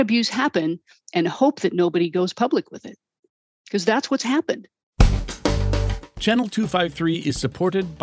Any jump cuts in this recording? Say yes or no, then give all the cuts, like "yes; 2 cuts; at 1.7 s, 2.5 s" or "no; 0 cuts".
yes; 1 cut; at 4.9 s